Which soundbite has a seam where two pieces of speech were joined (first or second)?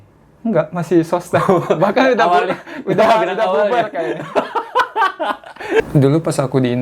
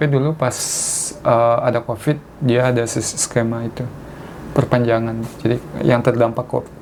first